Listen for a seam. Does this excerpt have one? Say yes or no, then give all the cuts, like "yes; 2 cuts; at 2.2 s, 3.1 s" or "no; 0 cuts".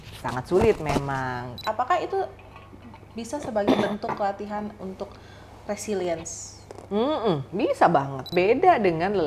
yes; 2 cuts; at 1.6 s, 8.2 s